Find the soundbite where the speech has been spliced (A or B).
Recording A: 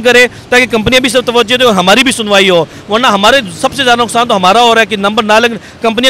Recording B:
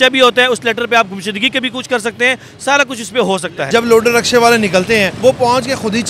B